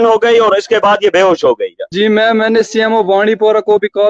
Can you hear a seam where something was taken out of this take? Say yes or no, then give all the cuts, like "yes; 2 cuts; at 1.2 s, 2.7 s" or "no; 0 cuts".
yes; 1 cut; at 1.8 s